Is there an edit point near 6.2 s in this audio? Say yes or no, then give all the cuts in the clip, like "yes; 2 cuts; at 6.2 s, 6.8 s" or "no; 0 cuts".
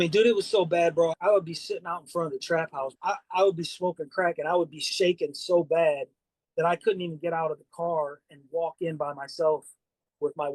no; 2 cuts; at 1.1 s, 2.9 s